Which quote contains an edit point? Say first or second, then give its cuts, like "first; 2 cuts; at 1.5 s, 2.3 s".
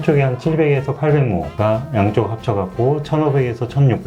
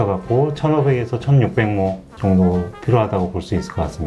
first; 1 cut; at 1.5 s